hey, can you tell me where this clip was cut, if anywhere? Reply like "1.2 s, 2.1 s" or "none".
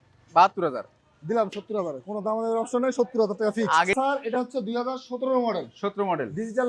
3.9 s

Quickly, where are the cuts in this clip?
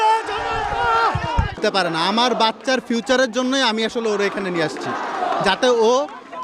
1.6 s

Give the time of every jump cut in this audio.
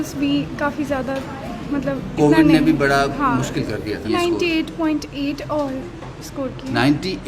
4.0 s

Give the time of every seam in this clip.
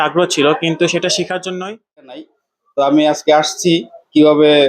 2.2 s

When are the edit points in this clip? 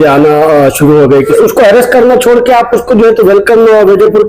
1.3 s

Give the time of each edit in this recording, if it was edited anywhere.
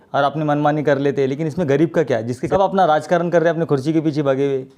2.4 s

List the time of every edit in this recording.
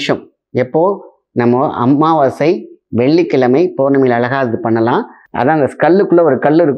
5.2 s

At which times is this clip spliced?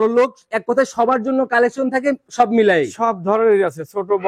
none

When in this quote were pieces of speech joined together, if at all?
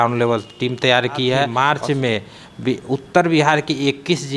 1.5 s

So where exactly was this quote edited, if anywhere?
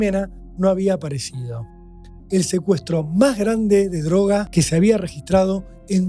2.1 s, 4.5 s

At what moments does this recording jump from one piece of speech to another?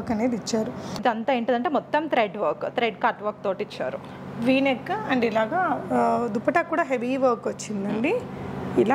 1.0 s

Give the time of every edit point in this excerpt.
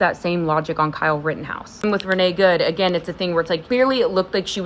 1.8 s, 3.6 s

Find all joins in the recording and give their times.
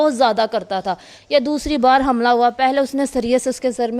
none

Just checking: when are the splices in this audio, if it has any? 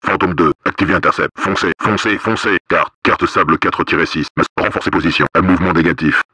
1.3 s, 2.6 s, 5.3 s

